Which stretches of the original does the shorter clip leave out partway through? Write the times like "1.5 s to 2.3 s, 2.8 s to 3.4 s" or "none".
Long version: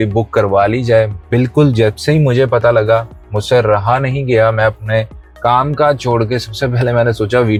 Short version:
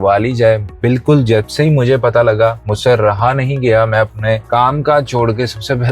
3.2 s to 3.3 s, 5.1 s to 5.4 s